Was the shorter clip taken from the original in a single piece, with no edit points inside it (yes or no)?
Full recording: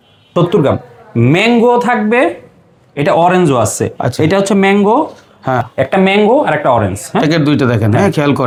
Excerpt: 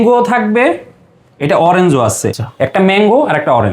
no